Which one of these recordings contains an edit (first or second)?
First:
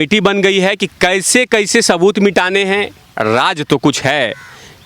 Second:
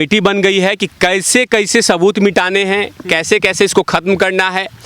first